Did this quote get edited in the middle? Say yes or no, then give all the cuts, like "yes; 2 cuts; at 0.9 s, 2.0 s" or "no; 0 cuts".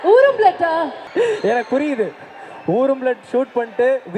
yes; 1 cut; at 1.0 s